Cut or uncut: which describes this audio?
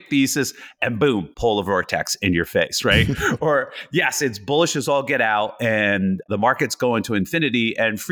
cut